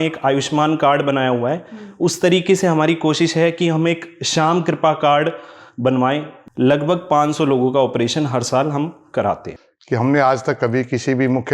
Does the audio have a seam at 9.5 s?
yes; 2 cuts; at 6.4 s, 9.5 s

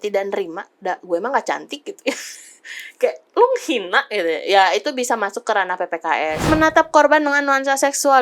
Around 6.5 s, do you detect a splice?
yes; 1 cut; at 6.5 s

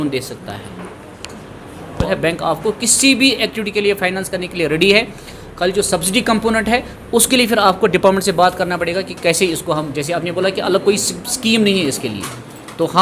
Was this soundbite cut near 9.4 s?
no; 1 cut; at 2.1 s

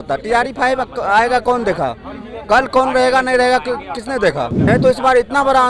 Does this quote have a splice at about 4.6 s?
yes; 1 cut; at 4.6 s

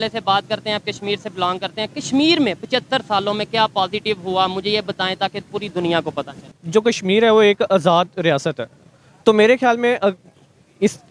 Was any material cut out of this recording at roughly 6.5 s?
yes; 1 cut; at 6.5 s

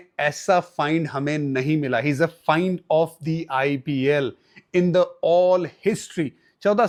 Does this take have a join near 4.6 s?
no; 0 cuts

